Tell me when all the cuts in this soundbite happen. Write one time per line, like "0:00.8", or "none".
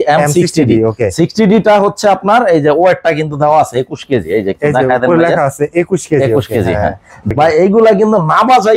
0:07.2